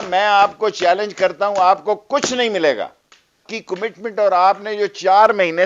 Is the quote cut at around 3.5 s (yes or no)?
yes